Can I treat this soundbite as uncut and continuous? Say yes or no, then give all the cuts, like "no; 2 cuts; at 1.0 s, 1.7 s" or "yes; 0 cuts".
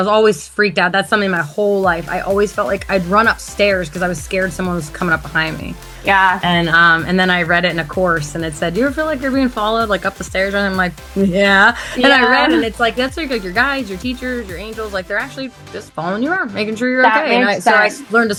yes; 0 cuts